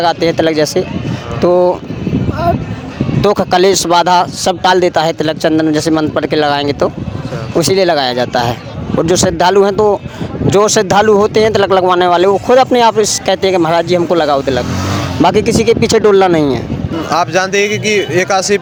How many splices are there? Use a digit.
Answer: 0